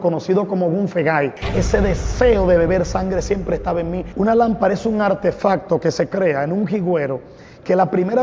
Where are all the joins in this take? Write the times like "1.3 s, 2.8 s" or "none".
1.4 s, 4.0 s